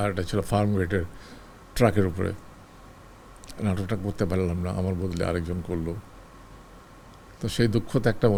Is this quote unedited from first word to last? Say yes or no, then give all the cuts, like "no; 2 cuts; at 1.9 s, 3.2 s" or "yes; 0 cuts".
yes; 0 cuts